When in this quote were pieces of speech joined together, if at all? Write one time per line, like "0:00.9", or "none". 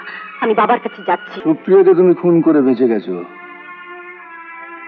0:01.3